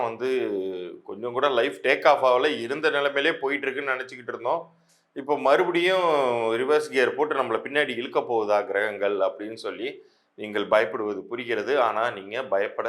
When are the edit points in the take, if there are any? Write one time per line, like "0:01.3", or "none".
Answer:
none